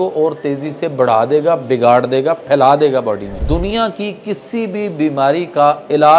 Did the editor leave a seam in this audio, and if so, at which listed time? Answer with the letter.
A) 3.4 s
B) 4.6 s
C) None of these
A